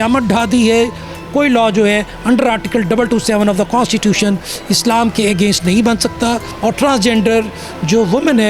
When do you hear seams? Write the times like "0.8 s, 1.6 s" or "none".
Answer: 1.2 s, 6.5 s